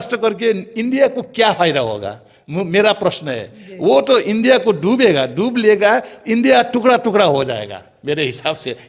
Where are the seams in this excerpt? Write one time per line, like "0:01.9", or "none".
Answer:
none